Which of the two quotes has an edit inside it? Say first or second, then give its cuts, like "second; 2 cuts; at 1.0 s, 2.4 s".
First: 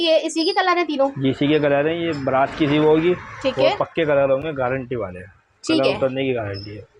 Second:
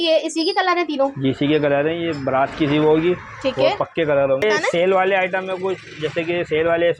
second; 1 cut; at 4.4 s